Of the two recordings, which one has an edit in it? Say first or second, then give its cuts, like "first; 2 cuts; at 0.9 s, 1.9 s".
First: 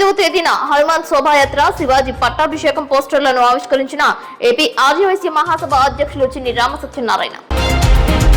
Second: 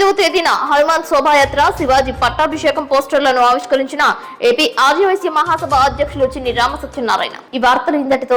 first; 1 cut; at 7.4 s